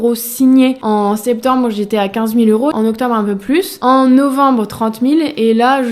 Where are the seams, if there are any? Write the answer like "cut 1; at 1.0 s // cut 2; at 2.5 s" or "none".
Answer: cut 1; at 0.8 s // cut 2; at 2.7 s // cut 3; at 3.7 s